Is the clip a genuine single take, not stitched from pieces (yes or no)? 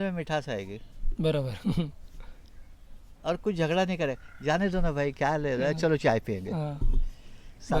yes